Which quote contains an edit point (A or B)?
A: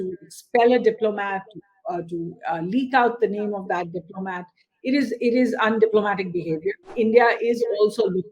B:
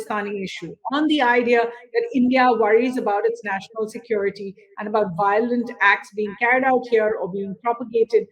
A